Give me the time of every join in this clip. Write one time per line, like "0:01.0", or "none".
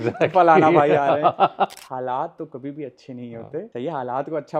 0:01.8
0:03.7